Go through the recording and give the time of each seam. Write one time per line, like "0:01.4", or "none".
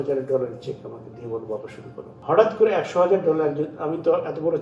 0:02.1